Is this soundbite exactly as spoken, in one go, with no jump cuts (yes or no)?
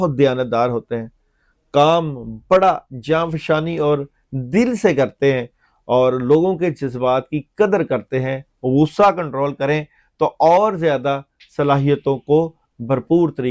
yes